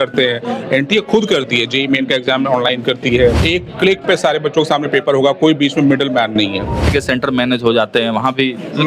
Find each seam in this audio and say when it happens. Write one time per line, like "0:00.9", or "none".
0:03.4
0:06.9